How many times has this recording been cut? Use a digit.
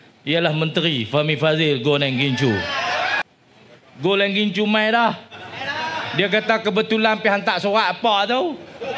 1